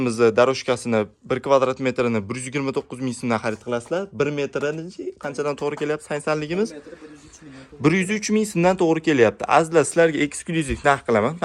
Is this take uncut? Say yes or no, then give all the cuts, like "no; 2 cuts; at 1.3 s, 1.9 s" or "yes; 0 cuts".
yes; 0 cuts